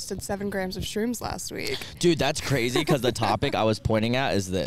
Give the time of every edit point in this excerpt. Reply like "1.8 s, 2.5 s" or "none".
none

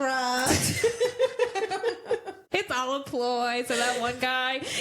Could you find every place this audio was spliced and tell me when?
2.3 s

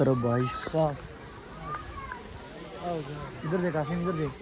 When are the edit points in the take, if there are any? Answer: none

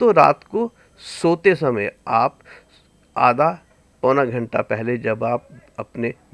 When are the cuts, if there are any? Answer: none

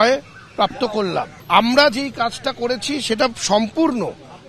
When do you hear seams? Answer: 1.4 s

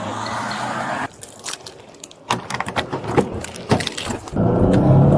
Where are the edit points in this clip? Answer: 1.1 s, 4.2 s

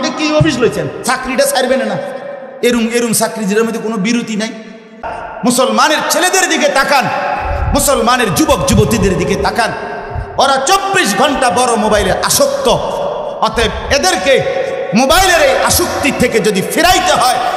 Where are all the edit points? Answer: 5.1 s

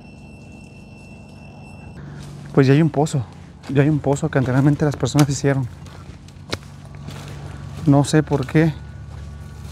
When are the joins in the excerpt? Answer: 2.0 s

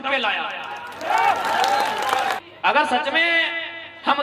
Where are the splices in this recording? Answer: 2.4 s

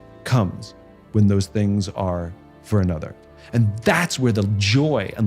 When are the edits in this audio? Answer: 3.1 s

